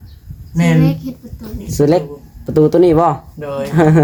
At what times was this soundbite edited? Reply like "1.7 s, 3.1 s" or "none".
none